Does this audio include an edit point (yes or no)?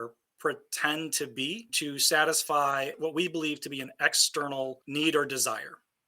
yes